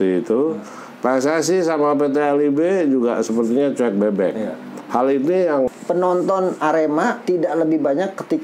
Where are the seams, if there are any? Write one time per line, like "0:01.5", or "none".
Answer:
0:05.7